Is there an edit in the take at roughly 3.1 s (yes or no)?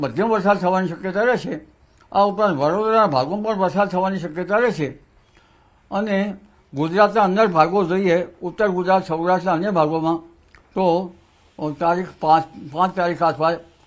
yes